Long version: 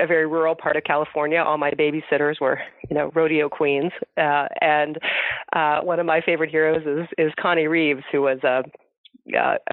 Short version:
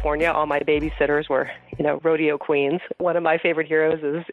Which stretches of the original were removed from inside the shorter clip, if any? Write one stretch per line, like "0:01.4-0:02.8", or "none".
0:04.1-0:05.8